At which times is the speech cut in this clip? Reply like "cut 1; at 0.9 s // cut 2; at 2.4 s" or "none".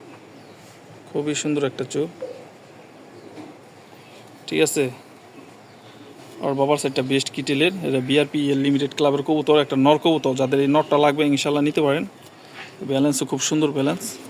none